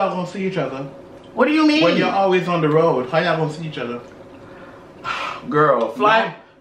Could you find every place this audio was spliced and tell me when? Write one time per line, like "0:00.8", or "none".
none